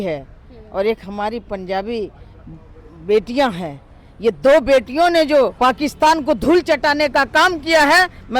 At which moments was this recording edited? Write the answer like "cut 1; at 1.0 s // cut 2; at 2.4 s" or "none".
cut 1; at 5.5 s